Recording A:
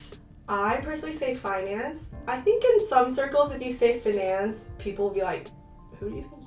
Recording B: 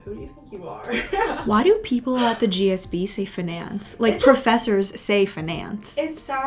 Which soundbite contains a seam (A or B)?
A